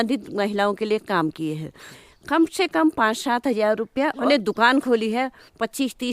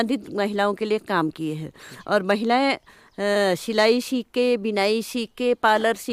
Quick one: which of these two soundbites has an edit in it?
first; 2 cuts; at 1.9 s, 4.2 s

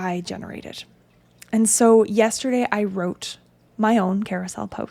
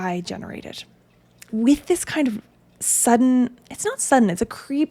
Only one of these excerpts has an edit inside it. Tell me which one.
second; 1 cut; at 1.5 s

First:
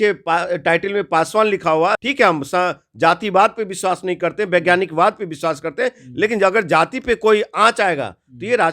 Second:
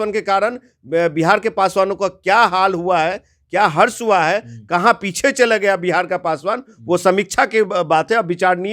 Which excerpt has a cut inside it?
first; 1 cut; at 2.0 s

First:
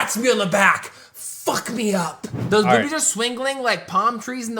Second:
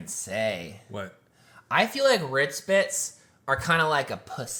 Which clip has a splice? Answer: first; 1 cut; at 2.3 s

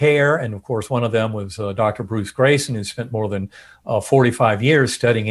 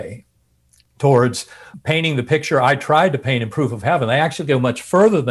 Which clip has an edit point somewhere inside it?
second; 1 cut; at 1.7 s

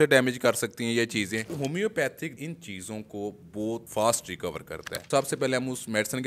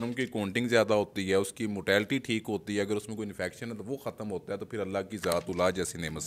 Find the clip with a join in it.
first; 4 cuts; at 1.5 s, 2.4 s, 3.9 s, 5.0 s

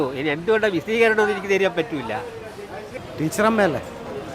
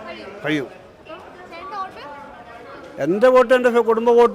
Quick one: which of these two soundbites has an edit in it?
first; 1 cut; at 3.0 s

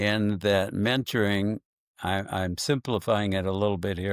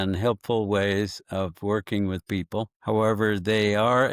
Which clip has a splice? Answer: second; 1 cut; at 2.8 s

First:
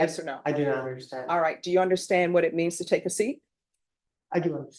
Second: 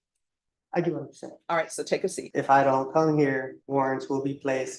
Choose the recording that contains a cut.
second; 2 cuts; at 2.2 s, 3.6 s

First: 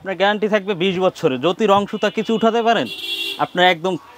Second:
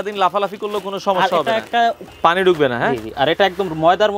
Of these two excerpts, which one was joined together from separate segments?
second; 1 cut; at 2.0 s

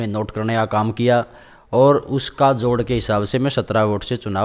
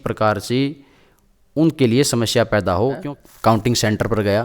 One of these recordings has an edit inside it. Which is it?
second; 1 cut; at 3.1 s

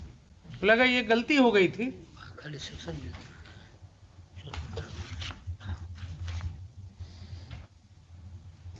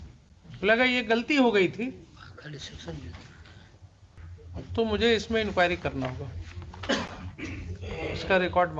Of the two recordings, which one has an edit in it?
second; 1 cut; at 4.2 s

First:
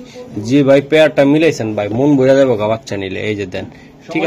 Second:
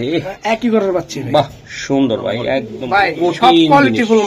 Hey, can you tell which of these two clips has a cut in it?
second; 1 cut; at 2.7 s

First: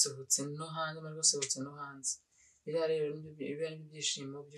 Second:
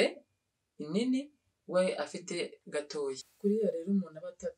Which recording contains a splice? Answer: second; 1 cut; at 3.3 s

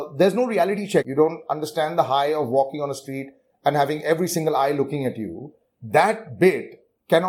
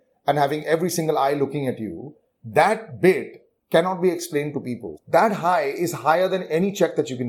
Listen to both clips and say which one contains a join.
first; 1 cut; at 1.1 s

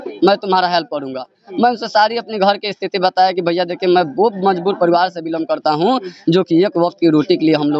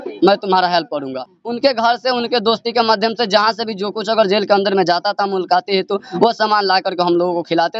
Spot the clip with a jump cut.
second; 1 cut; at 1.4 s

